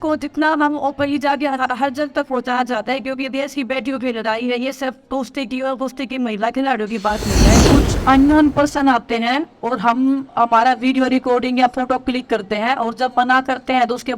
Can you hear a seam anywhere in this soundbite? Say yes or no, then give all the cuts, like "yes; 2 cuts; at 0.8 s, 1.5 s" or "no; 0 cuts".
yes; 1 cut; at 7.6 s